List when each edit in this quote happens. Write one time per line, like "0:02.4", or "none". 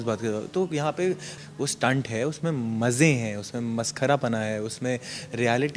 0:01.4